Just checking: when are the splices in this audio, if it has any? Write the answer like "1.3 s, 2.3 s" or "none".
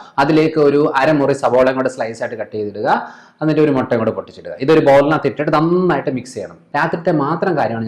6.6 s